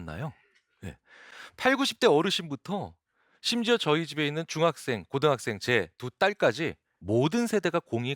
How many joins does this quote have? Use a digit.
1